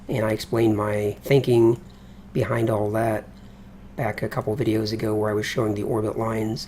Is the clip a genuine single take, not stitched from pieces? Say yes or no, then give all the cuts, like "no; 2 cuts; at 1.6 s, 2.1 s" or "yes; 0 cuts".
no; 1 cut; at 3.3 s